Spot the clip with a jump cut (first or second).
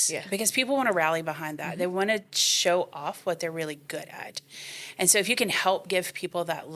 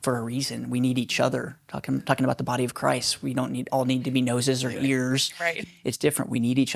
second